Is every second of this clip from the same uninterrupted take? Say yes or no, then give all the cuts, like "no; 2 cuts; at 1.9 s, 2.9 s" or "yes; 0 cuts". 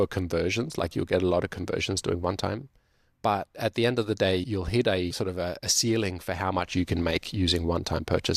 yes; 0 cuts